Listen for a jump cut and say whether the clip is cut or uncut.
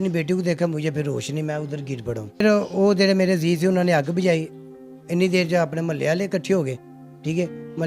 cut